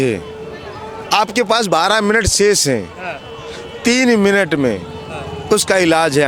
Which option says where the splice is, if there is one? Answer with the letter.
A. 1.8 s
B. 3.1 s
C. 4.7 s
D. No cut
D